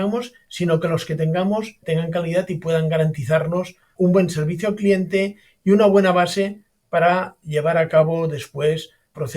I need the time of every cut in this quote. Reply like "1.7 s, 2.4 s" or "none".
1.8 s